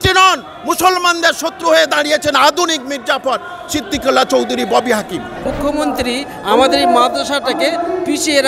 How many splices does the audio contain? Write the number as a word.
one